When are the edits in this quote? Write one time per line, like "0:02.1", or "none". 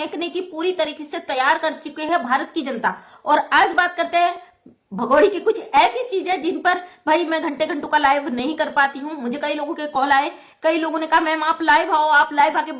none